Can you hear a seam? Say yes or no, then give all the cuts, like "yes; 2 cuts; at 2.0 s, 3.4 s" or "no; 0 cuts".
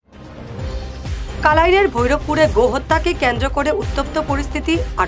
yes; 1 cut; at 1.0 s